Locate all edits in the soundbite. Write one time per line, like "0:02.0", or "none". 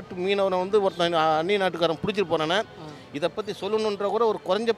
none